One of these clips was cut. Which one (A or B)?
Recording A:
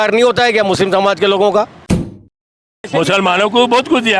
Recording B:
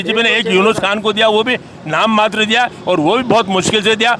A